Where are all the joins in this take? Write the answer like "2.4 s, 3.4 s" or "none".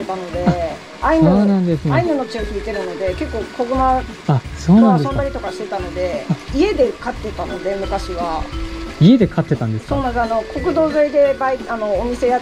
6.4 s